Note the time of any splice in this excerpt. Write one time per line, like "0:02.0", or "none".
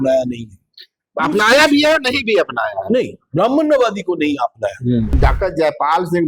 0:05.1